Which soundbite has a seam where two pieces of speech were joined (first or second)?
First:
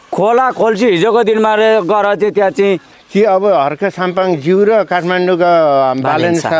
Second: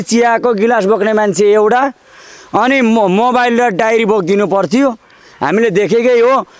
first